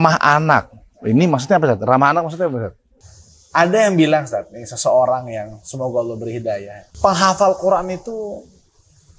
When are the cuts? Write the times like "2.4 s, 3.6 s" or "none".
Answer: 3.1 s, 6.8 s

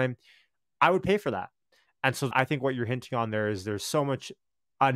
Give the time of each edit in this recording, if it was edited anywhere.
2.3 s

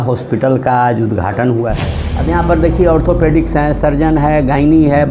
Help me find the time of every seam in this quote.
1.7 s

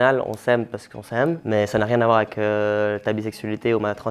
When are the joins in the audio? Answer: 1.4 s

